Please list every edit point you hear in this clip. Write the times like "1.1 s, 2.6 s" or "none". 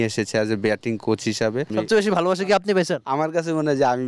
1.7 s